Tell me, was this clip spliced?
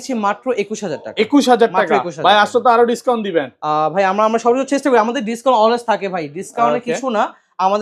no; 0 cuts

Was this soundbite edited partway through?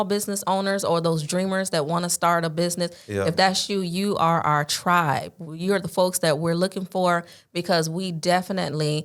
no; 0 cuts

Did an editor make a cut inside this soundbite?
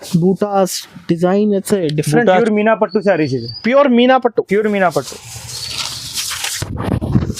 yes; 1 cut; at 2.4 s

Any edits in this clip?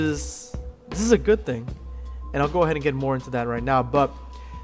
yes; 1 cut; at 1.2 s

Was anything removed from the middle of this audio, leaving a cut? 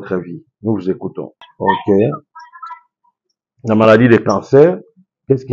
yes; 1 cut; at 1.5 s

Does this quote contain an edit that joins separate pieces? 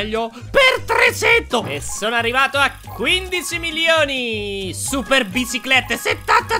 yes; 1 cut; at 1.8 s

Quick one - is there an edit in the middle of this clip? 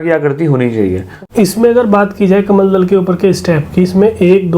yes; 1 cut; at 1.2 s

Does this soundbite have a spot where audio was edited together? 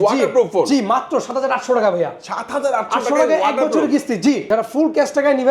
yes; 1 cut; at 4.4 s

